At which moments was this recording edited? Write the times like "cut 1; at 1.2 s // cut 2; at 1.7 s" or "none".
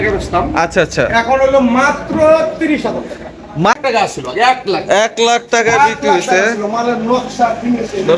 cut 1; at 3.8 s